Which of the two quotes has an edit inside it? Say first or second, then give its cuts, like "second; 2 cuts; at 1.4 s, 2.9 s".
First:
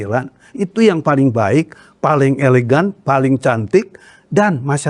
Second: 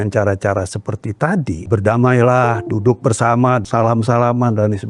second; 2 cuts; at 1.7 s, 3.6 s